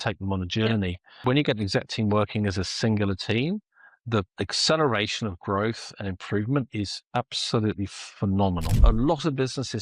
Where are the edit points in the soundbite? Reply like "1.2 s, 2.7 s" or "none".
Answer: 1.2 s, 4.3 s, 8.7 s